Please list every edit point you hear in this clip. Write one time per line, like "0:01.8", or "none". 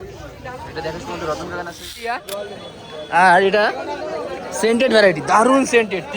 0:02.2